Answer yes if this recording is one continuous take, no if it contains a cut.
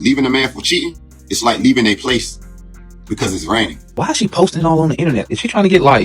no